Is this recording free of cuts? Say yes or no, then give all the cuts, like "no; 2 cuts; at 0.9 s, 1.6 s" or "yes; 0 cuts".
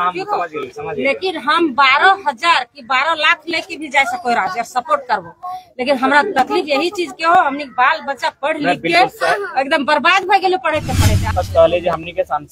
no; 1 cut; at 11.3 s